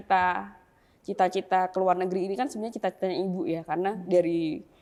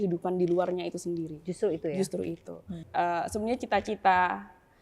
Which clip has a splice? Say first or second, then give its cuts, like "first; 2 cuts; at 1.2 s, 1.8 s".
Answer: second; 1 cut; at 2.8 s